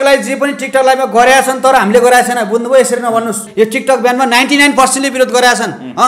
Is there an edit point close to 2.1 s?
no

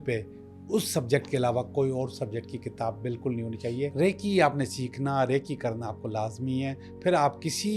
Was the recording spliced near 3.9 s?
yes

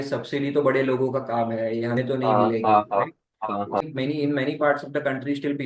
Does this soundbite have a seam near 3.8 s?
yes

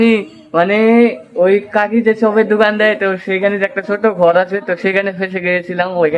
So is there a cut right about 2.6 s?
no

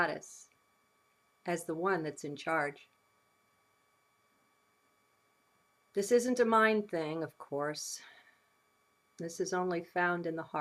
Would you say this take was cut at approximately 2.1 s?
yes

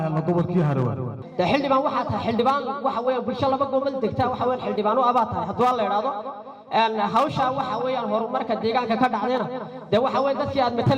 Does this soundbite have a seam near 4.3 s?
no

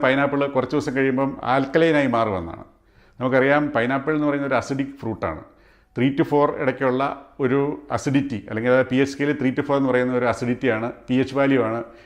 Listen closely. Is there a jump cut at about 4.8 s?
no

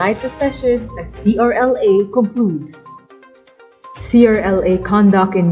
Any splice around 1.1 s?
no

